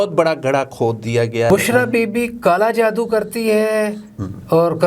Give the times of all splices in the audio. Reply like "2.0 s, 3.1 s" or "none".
1.5 s